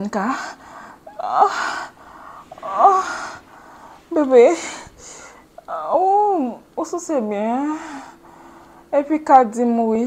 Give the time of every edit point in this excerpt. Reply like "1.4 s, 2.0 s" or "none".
none